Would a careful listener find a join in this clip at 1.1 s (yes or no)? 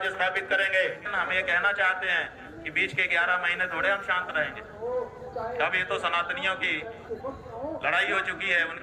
yes